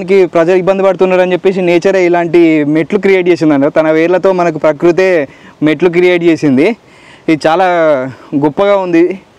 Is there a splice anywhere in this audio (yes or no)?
no